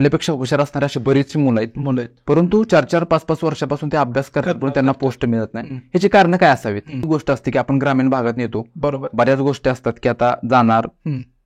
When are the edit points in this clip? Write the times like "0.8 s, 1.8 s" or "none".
7.1 s